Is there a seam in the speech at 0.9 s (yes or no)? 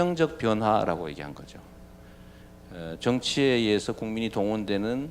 yes